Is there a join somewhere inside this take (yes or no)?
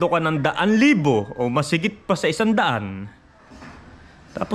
no